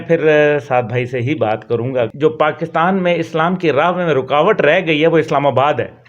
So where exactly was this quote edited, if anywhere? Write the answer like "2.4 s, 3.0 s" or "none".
2.1 s